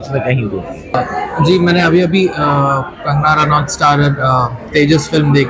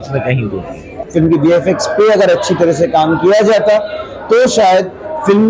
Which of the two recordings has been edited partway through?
second; 1 cut; at 1.0 s

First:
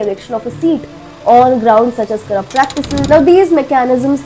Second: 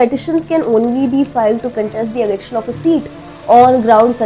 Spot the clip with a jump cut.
first; 1 cut; at 3.0 s

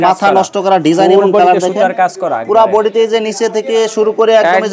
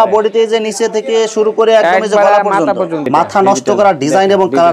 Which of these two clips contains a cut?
second; 1 cut; at 3.0 s

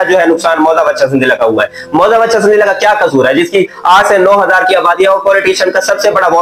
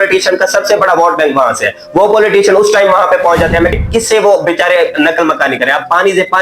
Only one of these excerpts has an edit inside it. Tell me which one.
second; 1 cut; at 3.7 s

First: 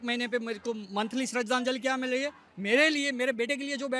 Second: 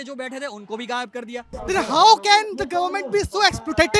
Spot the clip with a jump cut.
second; 1 cut; at 1.5 s

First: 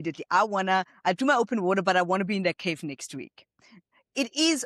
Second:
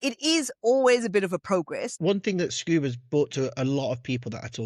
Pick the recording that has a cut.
second; 1 cut; at 1.8 s

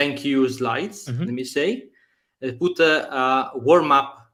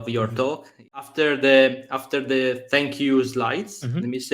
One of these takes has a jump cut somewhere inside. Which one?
second; 1 cut; at 1.1 s

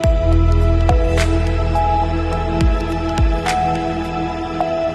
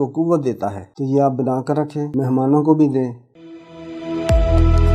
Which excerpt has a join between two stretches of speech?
second; 2 cuts; at 2.1 s, 3.3 s

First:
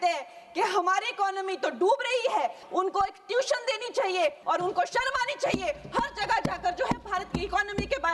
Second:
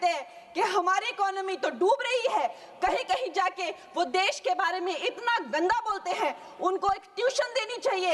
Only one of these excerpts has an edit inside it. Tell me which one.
first; 2 cuts; at 2.6 s, 4.4 s

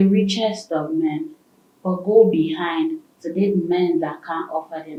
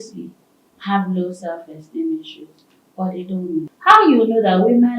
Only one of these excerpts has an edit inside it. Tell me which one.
second; 1 cut; at 3.7 s

